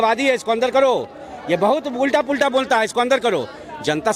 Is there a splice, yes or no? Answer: no